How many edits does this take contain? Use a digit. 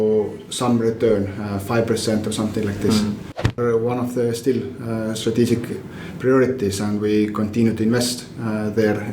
1